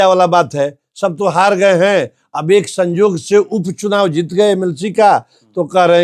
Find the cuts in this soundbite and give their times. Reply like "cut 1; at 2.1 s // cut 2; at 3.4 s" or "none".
none